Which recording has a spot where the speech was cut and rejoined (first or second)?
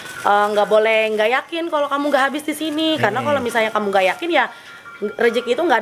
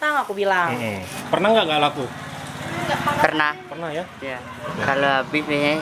second